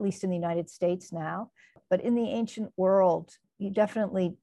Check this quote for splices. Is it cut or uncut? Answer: cut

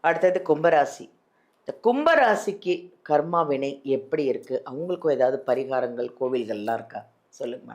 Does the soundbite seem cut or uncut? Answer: uncut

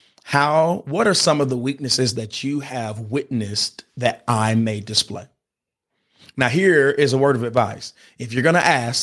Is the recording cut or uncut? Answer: uncut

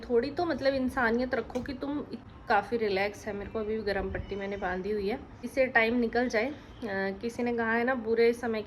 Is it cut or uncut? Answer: cut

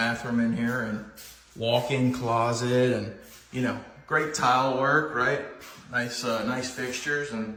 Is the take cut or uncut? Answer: uncut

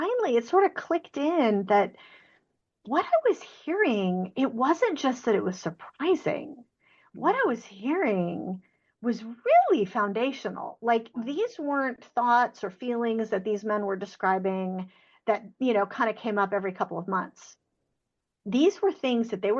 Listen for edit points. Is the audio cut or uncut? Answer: uncut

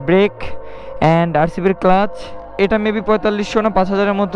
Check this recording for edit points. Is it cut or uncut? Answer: cut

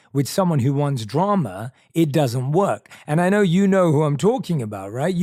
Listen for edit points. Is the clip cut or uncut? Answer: uncut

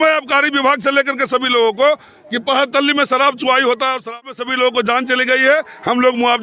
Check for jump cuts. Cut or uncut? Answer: cut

